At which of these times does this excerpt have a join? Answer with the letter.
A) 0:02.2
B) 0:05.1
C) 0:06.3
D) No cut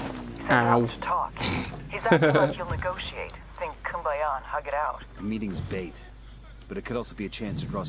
D